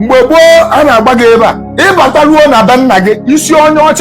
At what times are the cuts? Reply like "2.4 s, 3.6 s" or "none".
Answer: 1.7 s